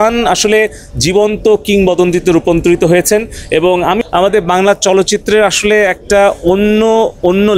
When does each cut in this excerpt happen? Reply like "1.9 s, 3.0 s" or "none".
4.0 s